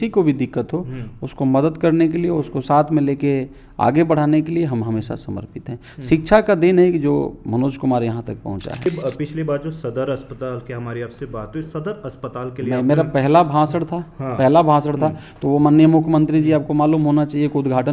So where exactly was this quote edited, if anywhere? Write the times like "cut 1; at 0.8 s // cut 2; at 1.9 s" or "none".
cut 1; at 8.9 s